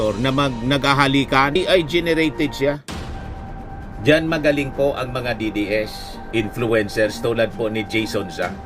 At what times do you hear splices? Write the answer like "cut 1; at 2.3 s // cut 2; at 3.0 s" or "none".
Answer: cut 1; at 1.5 s

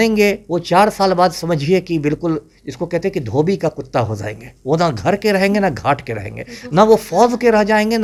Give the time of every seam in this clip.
none

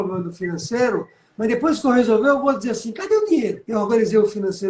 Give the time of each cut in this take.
cut 1; at 3.6 s

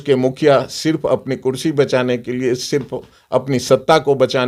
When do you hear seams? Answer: none

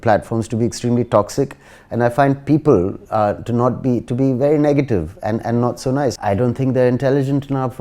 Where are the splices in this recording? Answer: none

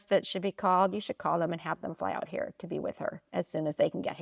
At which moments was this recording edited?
none

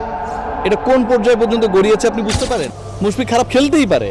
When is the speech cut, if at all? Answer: cut 1; at 2.8 s

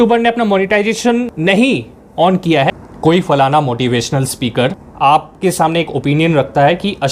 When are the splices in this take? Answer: cut 1; at 1.3 s // cut 2; at 2.7 s // cut 3; at 4.8 s

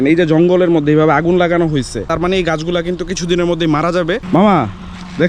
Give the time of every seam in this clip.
cut 1; at 2.1 s // cut 2; at 4.2 s

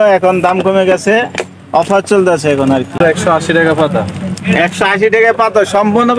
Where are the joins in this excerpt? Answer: cut 1; at 2.9 s

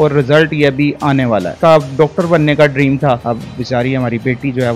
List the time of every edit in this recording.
cut 1; at 1.5 s // cut 2; at 3.2 s

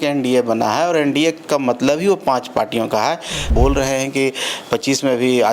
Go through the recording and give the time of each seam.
cut 1; at 3.5 s

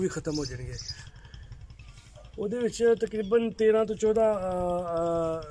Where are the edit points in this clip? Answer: cut 1; at 1.0 s

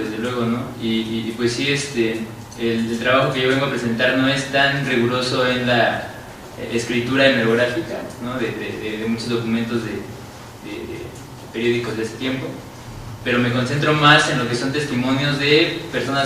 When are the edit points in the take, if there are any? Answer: cut 1; at 6.9 s

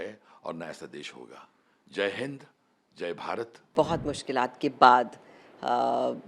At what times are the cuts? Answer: cut 1; at 3.7 s

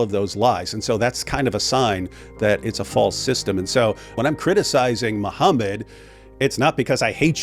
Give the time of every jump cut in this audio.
cut 1; at 4.1 s

